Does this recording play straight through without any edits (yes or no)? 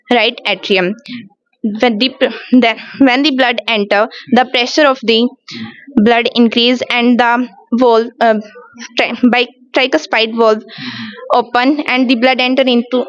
yes